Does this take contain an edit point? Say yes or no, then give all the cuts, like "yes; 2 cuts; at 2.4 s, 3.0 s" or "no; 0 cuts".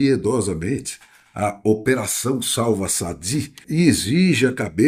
yes; 1 cut; at 3.6 s